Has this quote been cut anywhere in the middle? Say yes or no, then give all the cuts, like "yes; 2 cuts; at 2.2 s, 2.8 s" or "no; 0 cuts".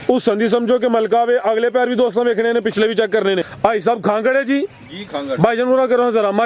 yes; 1 cut; at 3.5 s